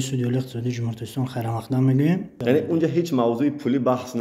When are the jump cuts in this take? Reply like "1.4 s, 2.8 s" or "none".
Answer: 2.3 s